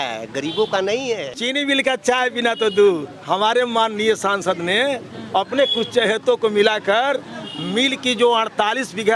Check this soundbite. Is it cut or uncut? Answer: cut